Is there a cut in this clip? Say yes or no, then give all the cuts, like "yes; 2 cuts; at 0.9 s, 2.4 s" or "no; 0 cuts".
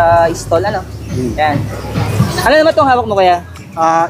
no; 0 cuts